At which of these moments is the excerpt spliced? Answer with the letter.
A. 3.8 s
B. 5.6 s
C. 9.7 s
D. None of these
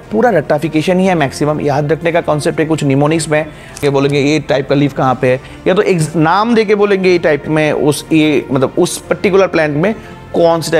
A